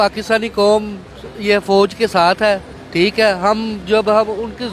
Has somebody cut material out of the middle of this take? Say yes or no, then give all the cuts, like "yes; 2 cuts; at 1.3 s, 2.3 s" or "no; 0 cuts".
no; 0 cuts